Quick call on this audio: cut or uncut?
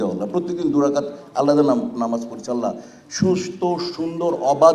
uncut